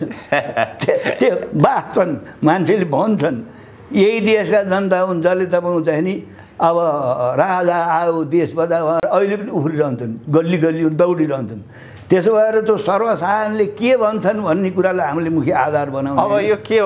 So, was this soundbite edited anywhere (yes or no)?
no